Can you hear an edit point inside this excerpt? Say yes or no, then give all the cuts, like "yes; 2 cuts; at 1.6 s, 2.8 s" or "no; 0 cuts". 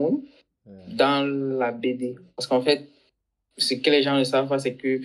yes; 1 cut; at 2.3 s